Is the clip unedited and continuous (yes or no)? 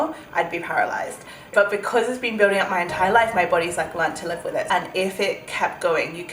no